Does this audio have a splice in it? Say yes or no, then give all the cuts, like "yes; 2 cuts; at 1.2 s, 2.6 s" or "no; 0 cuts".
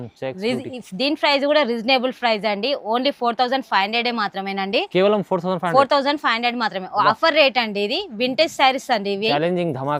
no; 0 cuts